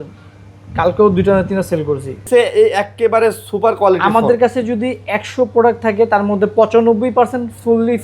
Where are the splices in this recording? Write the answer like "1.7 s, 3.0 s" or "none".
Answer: 2.2 s